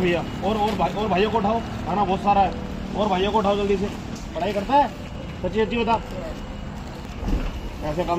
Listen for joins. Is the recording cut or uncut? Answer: cut